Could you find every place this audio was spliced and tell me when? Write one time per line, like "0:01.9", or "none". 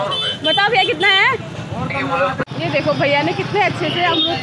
0:02.5